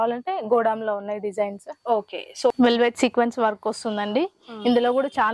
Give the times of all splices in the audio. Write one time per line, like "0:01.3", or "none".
0:02.5